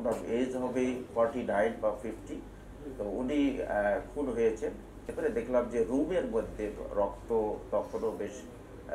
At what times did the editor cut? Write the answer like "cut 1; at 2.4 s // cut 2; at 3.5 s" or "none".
cut 1; at 5.1 s

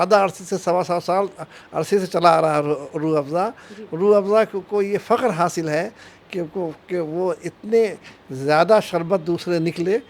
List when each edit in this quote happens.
none

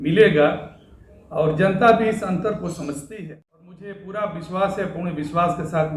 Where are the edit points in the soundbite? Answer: cut 1; at 3.1 s

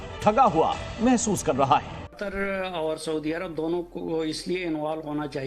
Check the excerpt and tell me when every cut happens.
cut 1; at 2.2 s

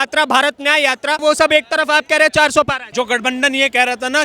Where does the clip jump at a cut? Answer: cut 1; at 1.2 s // cut 2; at 2.8 s

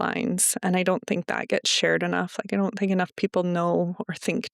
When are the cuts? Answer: none

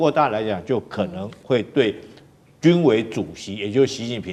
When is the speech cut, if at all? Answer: none

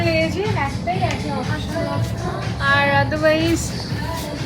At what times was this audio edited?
none

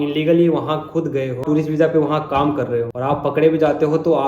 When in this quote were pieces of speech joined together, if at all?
cut 1; at 1.4 s // cut 2; at 2.9 s

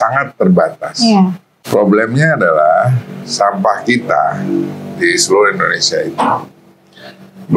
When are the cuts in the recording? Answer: cut 1; at 1.5 s

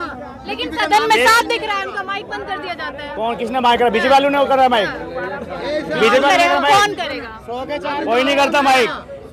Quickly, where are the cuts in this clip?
none

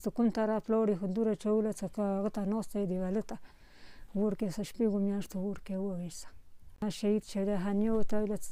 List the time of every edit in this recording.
cut 1; at 6.8 s

